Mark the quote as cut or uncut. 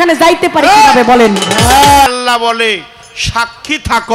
cut